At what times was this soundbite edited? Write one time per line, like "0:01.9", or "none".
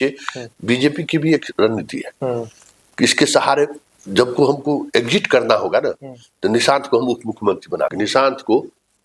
0:07.9